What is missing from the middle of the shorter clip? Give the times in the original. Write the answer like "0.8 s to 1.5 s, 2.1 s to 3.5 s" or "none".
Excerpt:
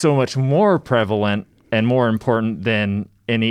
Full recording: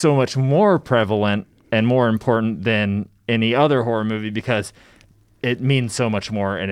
none